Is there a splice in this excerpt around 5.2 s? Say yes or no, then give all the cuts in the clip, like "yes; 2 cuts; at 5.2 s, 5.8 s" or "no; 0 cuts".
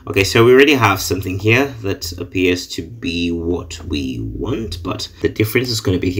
yes; 1 cut; at 5.2 s